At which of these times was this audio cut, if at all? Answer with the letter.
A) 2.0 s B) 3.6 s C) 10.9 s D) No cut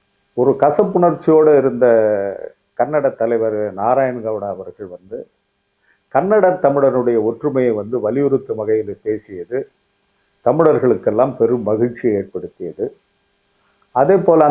D